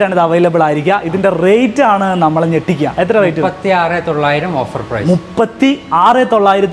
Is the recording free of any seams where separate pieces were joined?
yes; 0 cuts

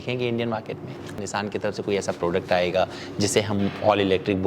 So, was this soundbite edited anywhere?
yes; 1 cut; at 1.2 s

